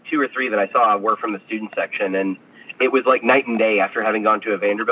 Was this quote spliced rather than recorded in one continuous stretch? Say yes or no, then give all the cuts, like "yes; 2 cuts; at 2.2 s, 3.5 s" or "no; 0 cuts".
no; 0 cuts